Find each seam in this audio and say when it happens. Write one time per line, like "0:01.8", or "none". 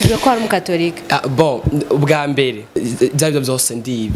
0:02.8